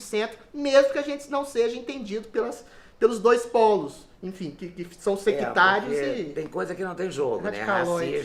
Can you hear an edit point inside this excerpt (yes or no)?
no